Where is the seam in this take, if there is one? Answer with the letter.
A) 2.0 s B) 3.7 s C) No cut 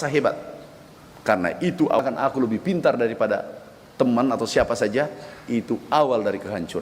A